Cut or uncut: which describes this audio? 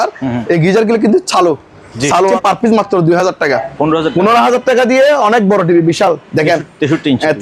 cut